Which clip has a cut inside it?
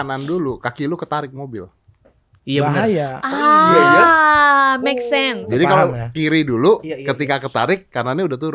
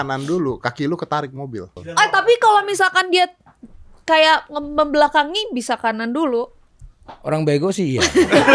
second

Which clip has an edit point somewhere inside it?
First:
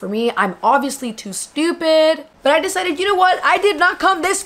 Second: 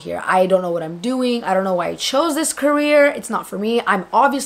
first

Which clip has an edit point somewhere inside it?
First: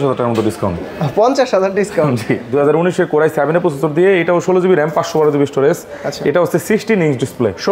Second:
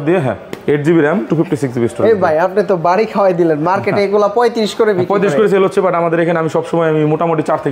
first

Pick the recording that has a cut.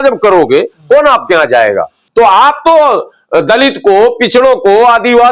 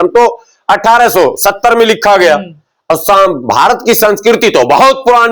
first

